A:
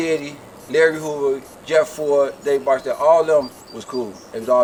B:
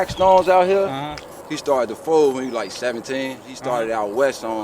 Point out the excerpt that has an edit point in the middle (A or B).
B